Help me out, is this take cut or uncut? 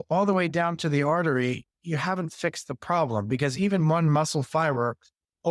uncut